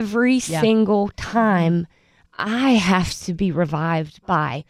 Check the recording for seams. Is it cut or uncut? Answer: uncut